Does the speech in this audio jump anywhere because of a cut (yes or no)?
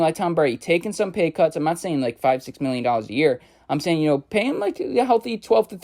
no